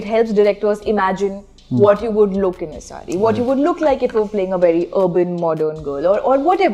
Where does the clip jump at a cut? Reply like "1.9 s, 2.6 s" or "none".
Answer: none